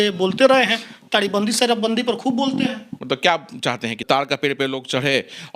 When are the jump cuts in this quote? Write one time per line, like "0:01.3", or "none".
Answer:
0:02.9
0:04.0